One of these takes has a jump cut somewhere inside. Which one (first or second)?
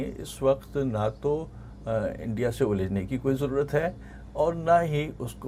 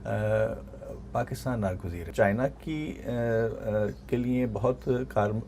second